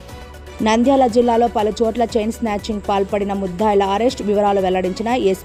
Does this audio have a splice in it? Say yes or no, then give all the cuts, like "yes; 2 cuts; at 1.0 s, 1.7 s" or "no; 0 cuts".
no; 0 cuts